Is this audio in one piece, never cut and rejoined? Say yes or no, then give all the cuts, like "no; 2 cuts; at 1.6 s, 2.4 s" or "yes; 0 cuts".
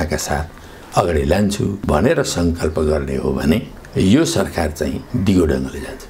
no; 2 cuts; at 1.8 s, 5.0 s